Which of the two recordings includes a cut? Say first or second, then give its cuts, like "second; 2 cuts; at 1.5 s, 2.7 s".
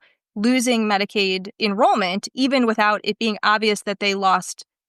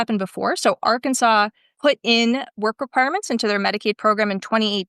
first; 1 cut; at 1.5 s